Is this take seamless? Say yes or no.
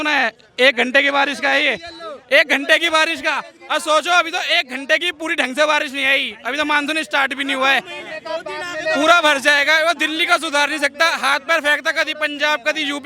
yes